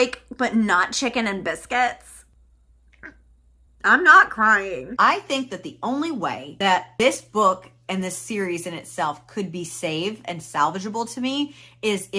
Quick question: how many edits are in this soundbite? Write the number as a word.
one